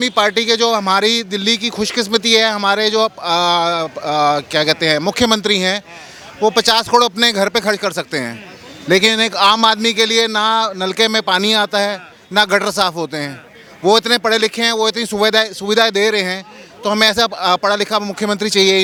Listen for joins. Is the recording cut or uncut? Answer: uncut